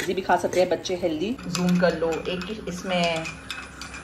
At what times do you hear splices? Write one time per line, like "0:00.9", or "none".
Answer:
0:01.4